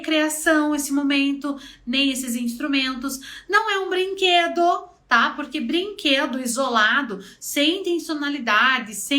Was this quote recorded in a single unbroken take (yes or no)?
yes